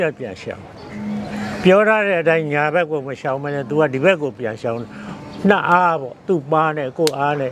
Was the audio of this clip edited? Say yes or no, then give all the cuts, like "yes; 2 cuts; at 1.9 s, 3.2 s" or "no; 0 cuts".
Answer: no; 0 cuts